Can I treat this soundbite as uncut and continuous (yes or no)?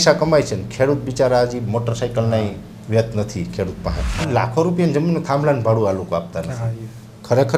no